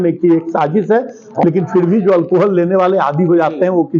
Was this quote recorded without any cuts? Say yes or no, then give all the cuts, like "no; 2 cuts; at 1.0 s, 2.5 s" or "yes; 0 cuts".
no; 1 cut; at 1.4 s